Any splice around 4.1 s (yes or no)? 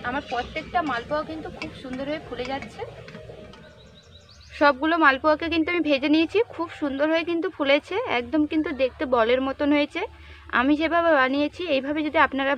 yes